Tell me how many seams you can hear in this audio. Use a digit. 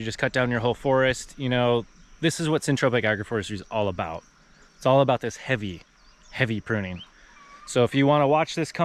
0